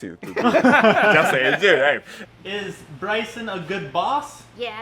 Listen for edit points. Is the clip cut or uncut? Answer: cut